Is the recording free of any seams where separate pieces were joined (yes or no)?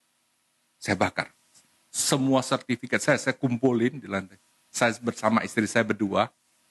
yes